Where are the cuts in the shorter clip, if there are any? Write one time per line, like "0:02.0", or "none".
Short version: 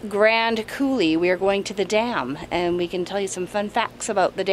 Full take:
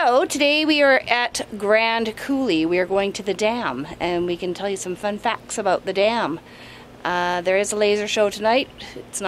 none